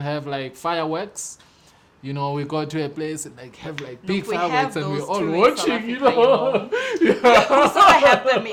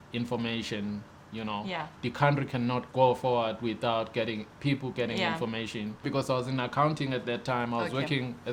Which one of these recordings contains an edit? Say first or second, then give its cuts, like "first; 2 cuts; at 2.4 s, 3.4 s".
second; 1 cut; at 6.1 s